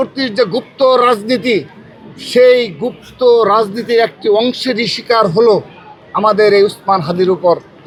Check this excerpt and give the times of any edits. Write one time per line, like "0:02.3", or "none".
none